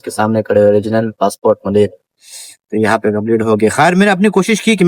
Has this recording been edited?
no; 0 cuts

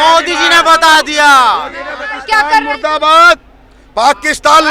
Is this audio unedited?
no; 1 cut; at 2.1 s

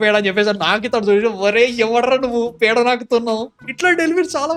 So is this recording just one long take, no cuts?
yes; 0 cuts

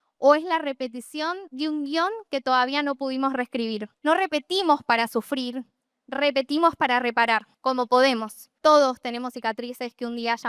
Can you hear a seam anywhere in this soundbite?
yes; 2 cuts; at 3.9 s, 8.4 s

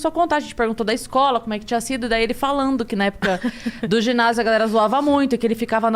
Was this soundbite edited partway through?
no; 0 cuts

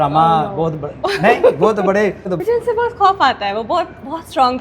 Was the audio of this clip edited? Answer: yes; 1 cut; at 2.3 s

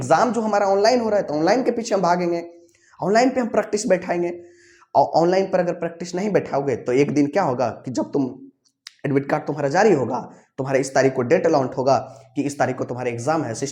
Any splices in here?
no; 0 cuts

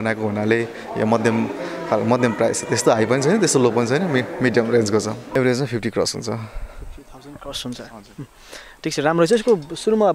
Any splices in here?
yes; 1 cut; at 5.2 s

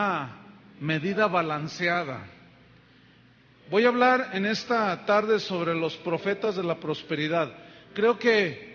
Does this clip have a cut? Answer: yes; 1 cut; at 6.4 s

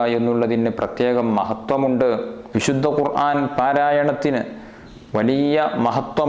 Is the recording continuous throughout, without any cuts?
no; 1 cut; at 2.4 s

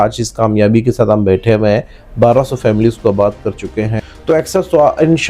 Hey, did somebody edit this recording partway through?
yes; 1 cut; at 3.9 s

